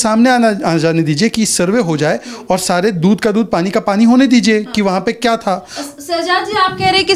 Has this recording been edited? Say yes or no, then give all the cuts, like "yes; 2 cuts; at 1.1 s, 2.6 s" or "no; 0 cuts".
no; 0 cuts